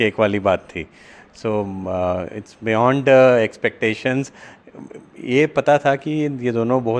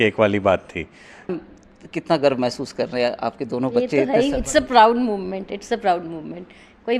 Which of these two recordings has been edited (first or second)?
second